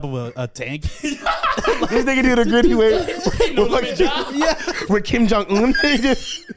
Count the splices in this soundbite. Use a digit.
0